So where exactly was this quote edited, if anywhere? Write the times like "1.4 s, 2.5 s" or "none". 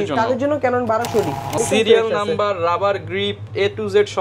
1.6 s